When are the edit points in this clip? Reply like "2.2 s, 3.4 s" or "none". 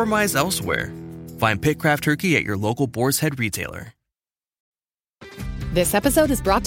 4.6 s